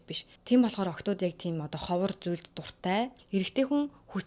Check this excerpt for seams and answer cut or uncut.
cut